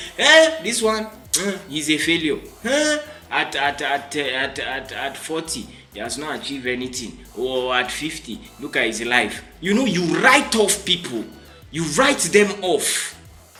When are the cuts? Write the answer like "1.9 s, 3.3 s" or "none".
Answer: none